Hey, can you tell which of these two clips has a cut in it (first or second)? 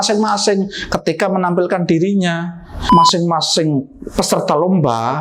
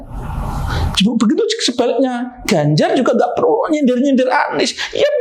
first